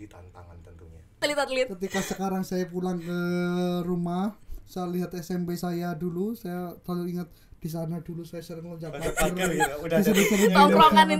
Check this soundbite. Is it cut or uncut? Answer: cut